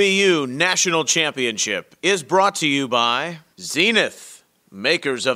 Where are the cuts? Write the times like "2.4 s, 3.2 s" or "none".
3.4 s